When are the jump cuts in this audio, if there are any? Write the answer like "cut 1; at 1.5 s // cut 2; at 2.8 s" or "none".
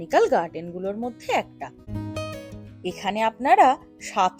cut 1; at 1.9 s